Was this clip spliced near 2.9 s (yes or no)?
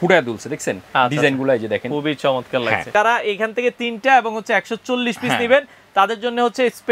yes